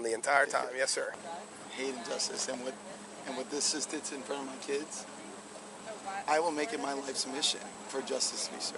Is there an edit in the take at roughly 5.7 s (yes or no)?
yes